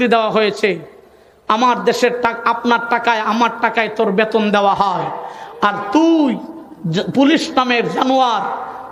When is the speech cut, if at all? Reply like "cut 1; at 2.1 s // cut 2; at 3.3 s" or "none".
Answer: none

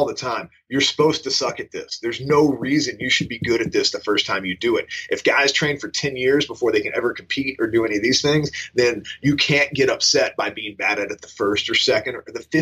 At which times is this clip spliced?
none

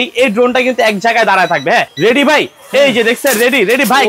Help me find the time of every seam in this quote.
cut 1; at 1.9 s

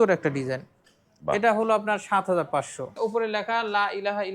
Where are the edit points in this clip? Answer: cut 1; at 2.9 s

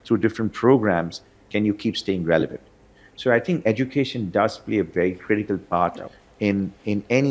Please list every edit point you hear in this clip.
none

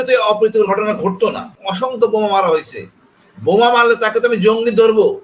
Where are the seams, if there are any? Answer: cut 1; at 1.5 s

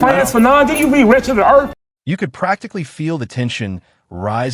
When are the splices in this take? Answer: none

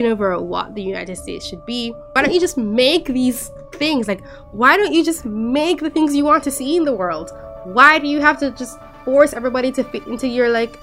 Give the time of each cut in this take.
cut 1; at 2.1 s

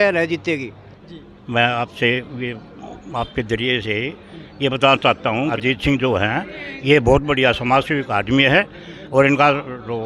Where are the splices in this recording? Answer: none

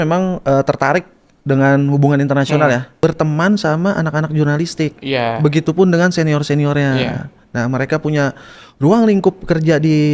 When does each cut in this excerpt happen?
cut 1; at 2.9 s

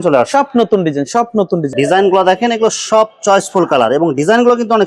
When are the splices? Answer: cut 1; at 1.7 s

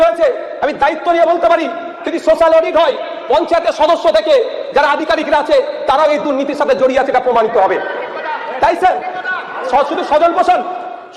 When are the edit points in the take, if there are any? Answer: none

